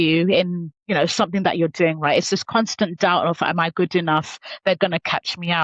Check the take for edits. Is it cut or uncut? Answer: uncut